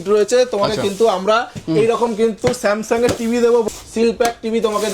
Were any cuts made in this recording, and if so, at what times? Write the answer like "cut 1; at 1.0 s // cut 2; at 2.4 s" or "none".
cut 1; at 3.6 s